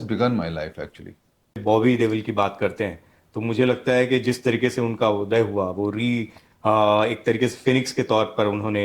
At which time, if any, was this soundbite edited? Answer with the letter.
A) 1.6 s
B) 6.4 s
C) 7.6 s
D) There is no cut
A